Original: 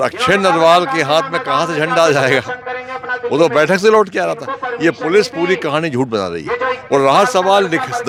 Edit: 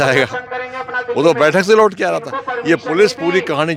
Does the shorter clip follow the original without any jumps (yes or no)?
yes